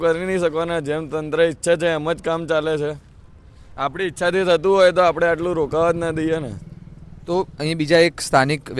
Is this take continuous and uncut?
yes; 0 cuts

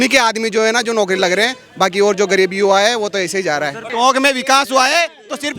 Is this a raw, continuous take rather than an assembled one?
no; 1 cut; at 3.8 s

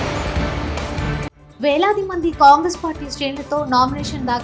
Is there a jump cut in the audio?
no; 0 cuts

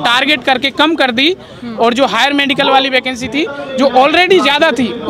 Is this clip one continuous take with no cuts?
yes; 0 cuts

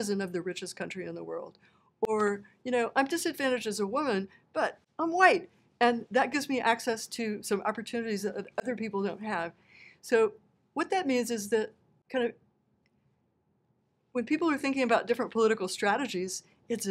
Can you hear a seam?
no; 0 cuts

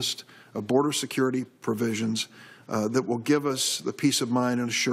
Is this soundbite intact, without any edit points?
no; 1 cut; at 0.9 s

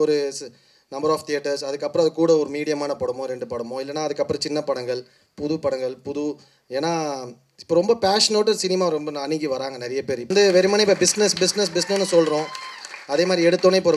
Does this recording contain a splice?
yes; 1 cut; at 10.3 s

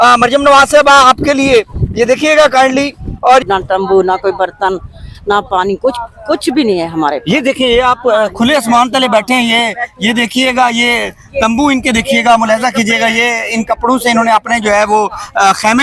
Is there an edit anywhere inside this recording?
yes; 1 cut; at 3.4 s

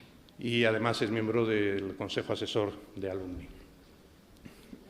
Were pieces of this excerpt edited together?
no; 0 cuts

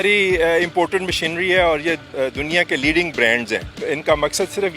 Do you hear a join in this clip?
yes; 2 cuts; at 2.1 s, 3.7 s

